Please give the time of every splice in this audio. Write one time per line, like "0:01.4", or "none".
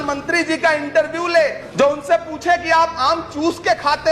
0:01.6